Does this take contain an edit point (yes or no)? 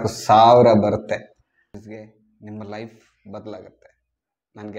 yes